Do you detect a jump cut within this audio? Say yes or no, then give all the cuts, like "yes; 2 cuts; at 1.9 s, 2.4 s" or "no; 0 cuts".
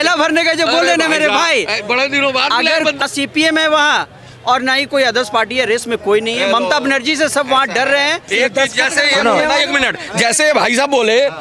yes; 2 cuts; at 3.0 s, 8.3 s